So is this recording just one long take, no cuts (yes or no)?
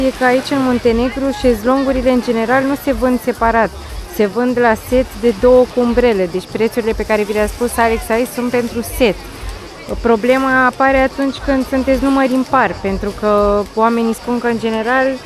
yes